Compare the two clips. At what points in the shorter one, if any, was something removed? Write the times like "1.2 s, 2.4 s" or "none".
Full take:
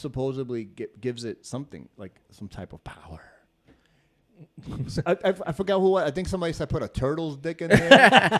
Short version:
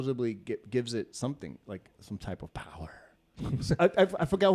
3.3 s